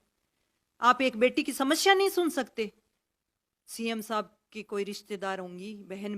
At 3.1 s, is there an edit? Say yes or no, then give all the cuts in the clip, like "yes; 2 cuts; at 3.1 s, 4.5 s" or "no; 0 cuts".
yes; 1 cut; at 3.1 s